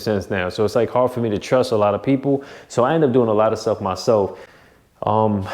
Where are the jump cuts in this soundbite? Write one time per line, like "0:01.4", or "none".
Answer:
0:04.4